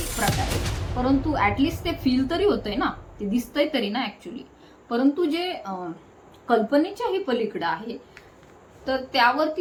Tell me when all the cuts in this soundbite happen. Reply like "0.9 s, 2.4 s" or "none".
none